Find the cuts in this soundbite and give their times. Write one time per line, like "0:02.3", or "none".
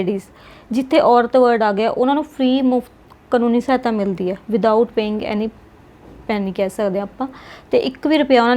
none

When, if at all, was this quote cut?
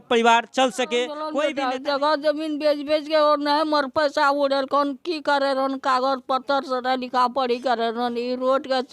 0:01.3

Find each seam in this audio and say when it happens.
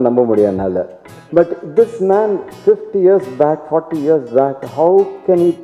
none

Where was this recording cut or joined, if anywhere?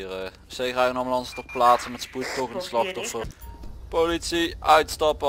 0:03.3

